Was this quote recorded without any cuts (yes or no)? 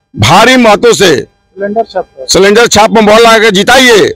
yes